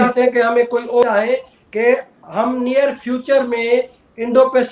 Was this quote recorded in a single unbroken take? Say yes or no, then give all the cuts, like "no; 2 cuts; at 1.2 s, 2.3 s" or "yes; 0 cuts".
no; 1 cut; at 1.0 s